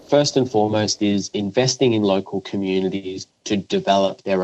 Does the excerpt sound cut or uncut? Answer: cut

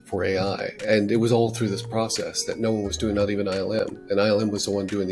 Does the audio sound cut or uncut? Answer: uncut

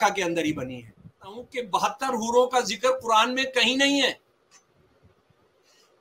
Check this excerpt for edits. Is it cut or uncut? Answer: cut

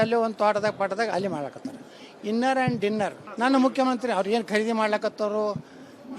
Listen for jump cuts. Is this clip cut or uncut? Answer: cut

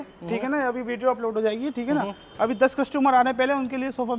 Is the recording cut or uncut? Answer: uncut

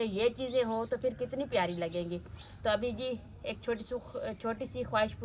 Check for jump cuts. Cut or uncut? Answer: uncut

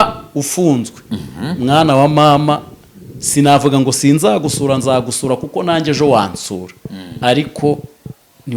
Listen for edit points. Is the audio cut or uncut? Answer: uncut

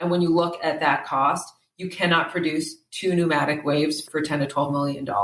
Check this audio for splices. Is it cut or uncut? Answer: cut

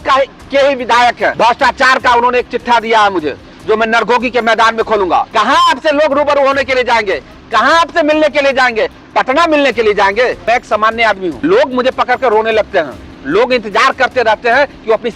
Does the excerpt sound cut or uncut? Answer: cut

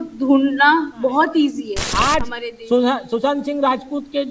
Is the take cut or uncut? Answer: cut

